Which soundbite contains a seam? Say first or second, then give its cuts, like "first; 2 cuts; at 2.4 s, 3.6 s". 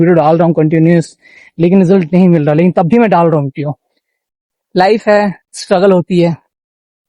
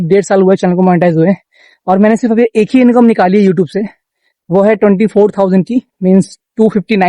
first; 1 cut; at 4.2 s